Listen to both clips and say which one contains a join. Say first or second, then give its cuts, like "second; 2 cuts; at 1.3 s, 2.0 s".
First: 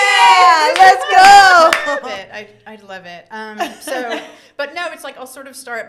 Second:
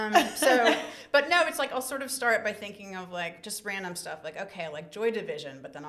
first; 1 cut; at 2.1 s